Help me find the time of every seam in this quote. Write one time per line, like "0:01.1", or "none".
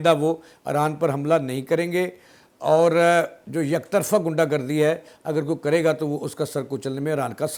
none